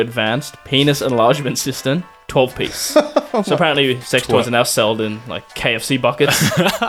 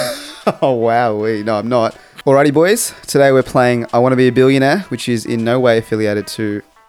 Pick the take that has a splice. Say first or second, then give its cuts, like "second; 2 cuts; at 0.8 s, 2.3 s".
second; 1 cut; at 2.1 s